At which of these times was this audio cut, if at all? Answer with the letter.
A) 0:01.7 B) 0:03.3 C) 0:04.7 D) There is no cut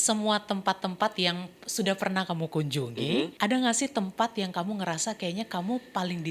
B